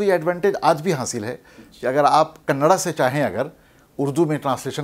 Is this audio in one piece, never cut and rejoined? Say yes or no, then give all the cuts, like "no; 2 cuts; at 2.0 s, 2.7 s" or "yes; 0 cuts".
yes; 0 cuts